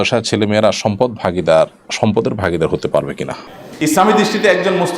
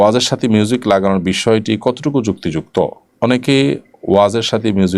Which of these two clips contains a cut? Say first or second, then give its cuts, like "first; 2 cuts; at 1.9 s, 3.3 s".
first; 1 cut; at 3.4 s